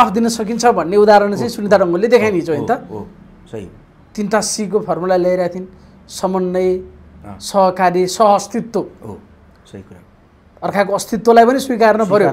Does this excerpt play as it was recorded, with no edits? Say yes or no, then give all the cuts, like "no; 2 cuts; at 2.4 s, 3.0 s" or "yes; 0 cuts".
yes; 0 cuts